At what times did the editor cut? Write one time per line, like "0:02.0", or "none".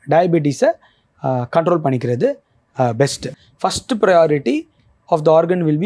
0:03.3